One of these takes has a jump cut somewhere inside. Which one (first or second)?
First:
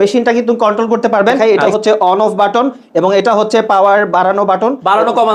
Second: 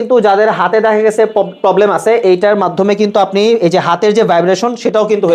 first